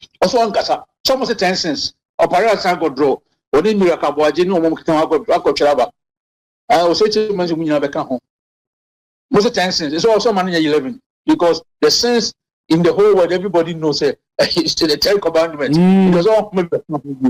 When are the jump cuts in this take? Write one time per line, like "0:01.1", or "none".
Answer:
none